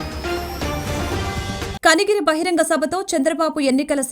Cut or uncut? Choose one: cut